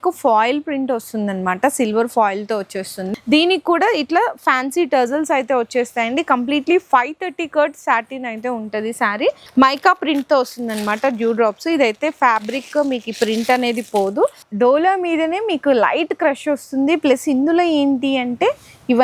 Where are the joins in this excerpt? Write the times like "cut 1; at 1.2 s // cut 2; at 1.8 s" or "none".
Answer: cut 1; at 3.0 s // cut 2; at 9.4 s // cut 3; at 14.4 s

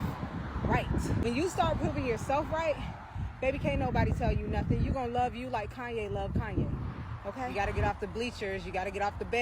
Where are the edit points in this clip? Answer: cut 1; at 1.2 s // cut 2; at 7.5 s

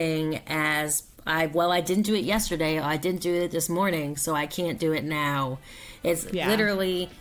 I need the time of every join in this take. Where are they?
none

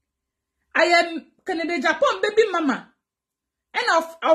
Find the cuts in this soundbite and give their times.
none

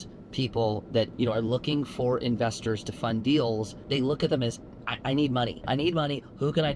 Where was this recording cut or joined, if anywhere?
cut 1; at 1.1 s // cut 2; at 3.8 s // cut 3; at 5.6 s

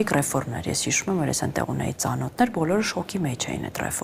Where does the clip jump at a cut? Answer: none

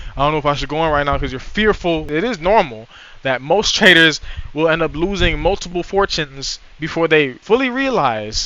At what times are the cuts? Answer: cut 1; at 2.1 s

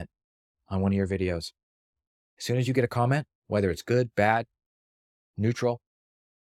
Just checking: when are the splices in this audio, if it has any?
none

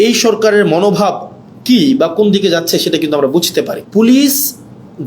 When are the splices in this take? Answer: cut 1; at 3.8 s

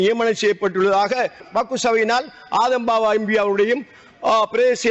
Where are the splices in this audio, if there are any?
cut 1; at 1.4 s

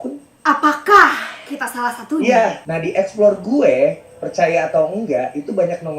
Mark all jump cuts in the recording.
cut 1; at 2.6 s

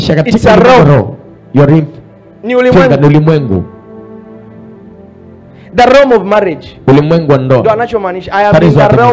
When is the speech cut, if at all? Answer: none

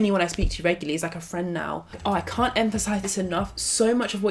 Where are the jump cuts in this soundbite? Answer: cut 1; at 1.9 s

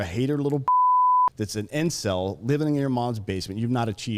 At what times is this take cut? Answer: none

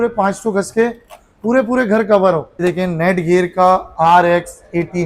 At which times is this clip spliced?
cut 1; at 2.6 s

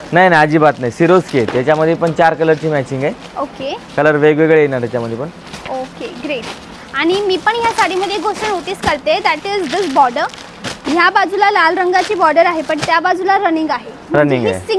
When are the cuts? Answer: none

